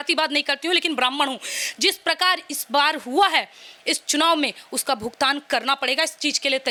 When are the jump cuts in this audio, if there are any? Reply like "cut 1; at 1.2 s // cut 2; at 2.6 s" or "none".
none